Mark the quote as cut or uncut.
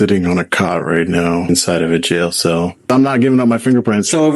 cut